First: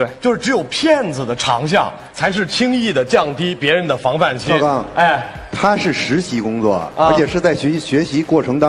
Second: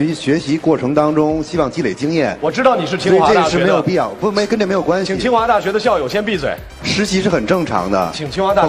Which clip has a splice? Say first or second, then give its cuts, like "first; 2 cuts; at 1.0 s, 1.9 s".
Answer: first; 1 cut; at 4.4 s